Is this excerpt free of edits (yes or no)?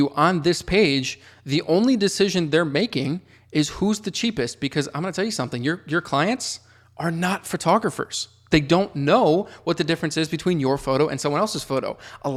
yes